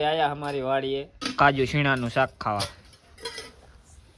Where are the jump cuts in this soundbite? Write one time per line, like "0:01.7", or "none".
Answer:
0:01.2